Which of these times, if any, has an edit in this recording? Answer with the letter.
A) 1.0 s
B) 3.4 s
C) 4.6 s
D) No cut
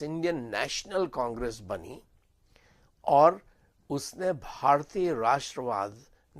D